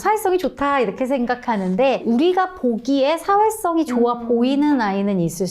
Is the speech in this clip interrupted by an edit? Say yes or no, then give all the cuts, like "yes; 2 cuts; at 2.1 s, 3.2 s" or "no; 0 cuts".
yes; 1 cut; at 2.0 s